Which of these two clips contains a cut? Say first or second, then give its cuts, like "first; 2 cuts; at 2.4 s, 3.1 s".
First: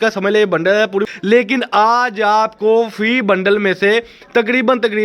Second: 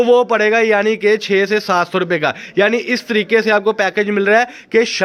first; 1 cut; at 1.1 s